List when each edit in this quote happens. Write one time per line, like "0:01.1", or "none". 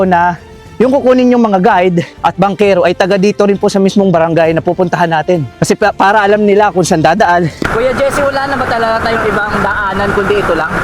0:02.1
0:07.7